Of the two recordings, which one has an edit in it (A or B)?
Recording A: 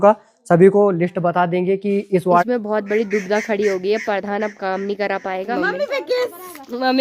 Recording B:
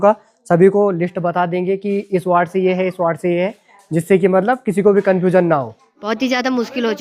A